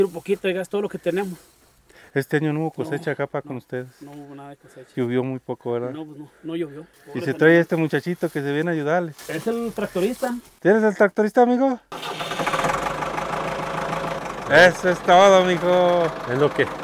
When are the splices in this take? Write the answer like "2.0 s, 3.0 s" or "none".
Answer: 11.9 s, 14.2 s